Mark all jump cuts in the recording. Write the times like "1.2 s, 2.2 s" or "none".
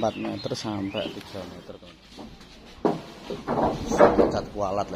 1.6 s